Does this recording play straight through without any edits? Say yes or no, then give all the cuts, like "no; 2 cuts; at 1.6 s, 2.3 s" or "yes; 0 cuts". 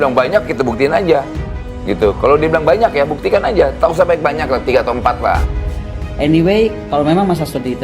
no; 1 cut; at 5.5 s